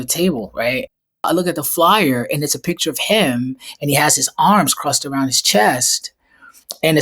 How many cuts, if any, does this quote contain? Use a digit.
1